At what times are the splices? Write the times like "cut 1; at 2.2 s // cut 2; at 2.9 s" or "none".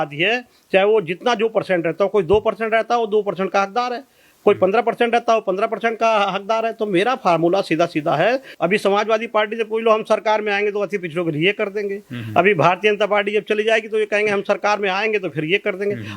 cut 1; at 8.5 s